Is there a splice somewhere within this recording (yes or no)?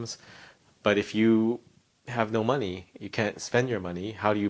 no